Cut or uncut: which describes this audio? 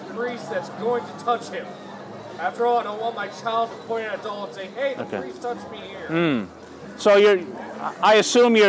uncut